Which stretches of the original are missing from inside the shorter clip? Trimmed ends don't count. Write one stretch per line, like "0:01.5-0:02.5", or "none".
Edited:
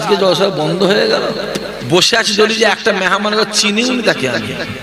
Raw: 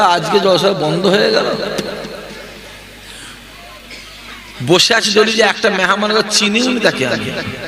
0:02.0-0:04.5